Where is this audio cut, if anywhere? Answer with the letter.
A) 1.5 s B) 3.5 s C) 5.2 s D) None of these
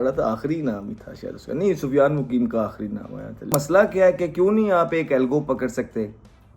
B